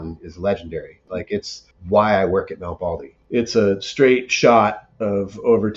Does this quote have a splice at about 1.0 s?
yes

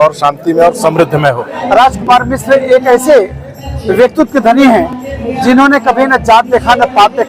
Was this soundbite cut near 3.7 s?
no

